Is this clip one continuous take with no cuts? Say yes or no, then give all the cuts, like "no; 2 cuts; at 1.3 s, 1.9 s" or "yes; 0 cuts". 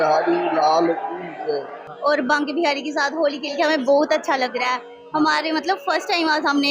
no; 1 cut; at 1.8 s